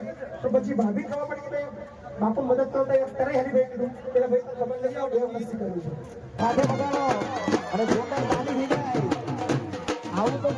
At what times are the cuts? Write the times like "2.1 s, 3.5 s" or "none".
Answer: 6.4 s